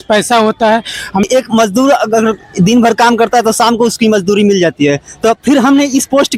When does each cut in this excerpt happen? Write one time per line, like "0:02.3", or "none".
0:01.2

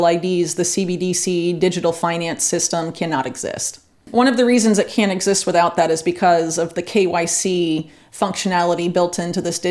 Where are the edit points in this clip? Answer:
none

